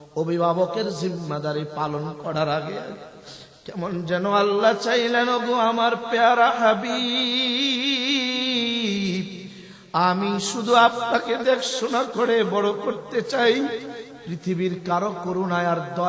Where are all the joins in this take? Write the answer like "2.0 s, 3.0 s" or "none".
none

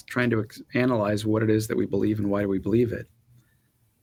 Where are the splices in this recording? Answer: none

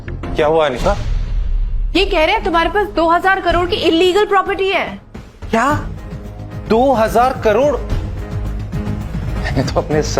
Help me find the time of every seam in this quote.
9.3 s

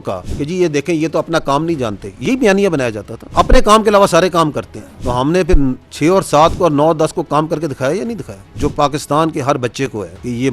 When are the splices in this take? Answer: 8.5 s

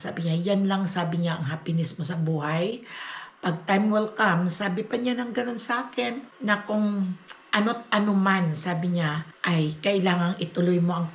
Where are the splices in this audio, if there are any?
6.3 s, 9.3 s

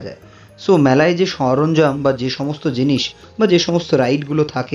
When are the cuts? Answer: none

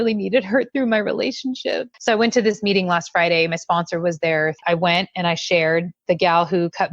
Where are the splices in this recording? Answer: 1.9 s, 4.6 s

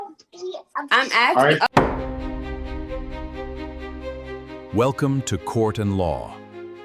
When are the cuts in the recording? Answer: 1.7 s

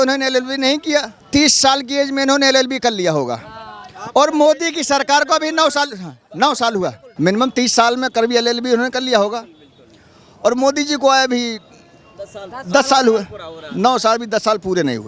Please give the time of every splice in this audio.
1.2 s, 7.0 s

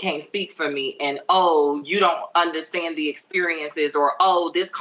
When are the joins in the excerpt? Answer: none

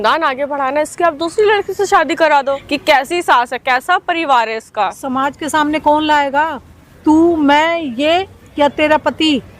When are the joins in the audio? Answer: 2.7 s

